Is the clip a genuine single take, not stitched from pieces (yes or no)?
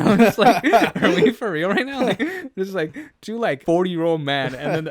no